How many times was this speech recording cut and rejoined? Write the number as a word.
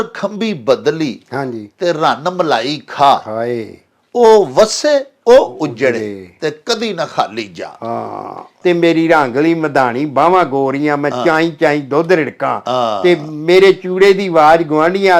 one